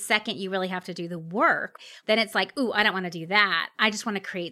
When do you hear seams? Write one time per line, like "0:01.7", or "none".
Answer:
0:01.7